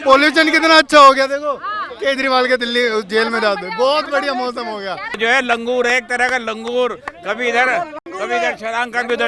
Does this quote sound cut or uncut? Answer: cut